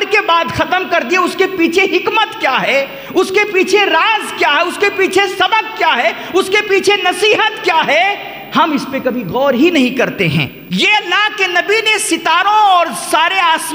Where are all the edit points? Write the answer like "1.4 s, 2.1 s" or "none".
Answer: 10.6 s